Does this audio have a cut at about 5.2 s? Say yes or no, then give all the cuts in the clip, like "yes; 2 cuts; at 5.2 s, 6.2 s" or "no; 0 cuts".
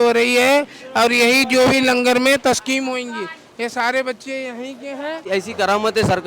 yes; 1 cut; at 5.2 s